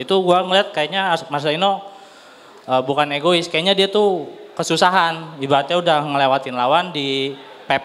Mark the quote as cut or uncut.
uncut